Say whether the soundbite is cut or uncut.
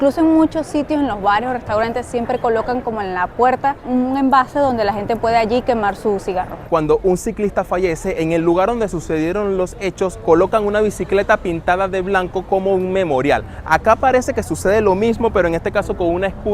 cut